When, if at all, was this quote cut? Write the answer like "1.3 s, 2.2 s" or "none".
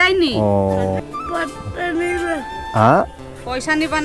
1.0 s